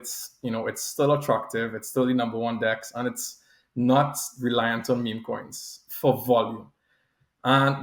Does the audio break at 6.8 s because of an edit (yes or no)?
no